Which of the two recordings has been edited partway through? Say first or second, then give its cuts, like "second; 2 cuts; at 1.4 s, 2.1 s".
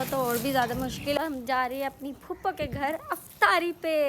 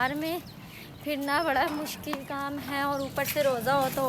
first; 1 cut; at 1.2 s